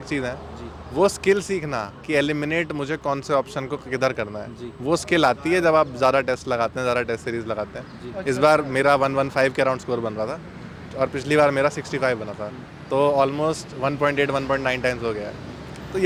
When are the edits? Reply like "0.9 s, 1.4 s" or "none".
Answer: none

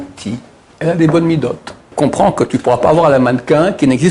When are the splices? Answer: 1.9 s

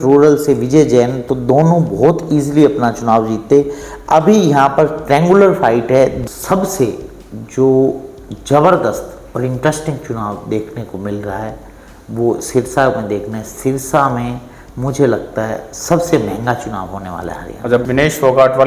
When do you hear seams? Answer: 6.2 s, 17.8 s

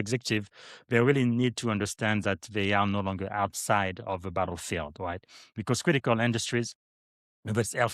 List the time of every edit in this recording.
none

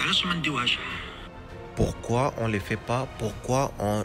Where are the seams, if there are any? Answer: none

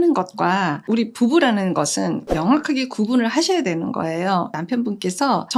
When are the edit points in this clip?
none

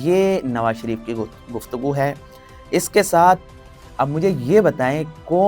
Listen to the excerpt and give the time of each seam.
none

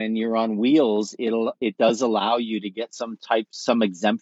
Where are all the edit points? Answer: none

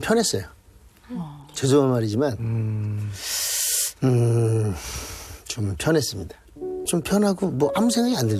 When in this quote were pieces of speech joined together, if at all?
6.9 s

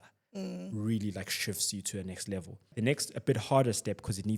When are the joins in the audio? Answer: 2.7 s

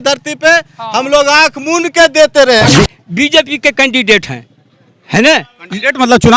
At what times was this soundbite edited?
2.7 s

